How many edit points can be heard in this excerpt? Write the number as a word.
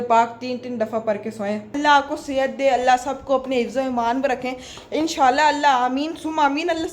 one